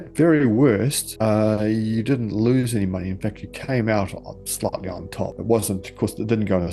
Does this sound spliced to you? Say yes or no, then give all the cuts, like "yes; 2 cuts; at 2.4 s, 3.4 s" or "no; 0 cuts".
no; 0 cuts